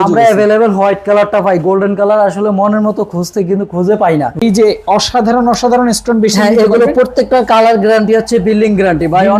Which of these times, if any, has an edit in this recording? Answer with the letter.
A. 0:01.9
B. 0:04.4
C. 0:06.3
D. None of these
B